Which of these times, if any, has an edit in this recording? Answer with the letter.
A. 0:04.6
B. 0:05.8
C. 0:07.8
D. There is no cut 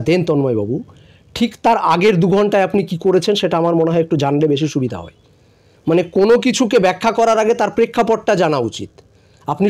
D